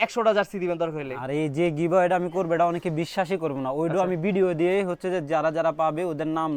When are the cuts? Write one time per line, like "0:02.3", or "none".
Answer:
none

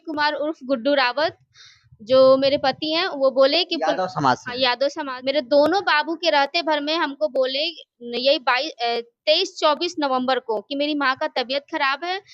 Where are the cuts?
0:05.1

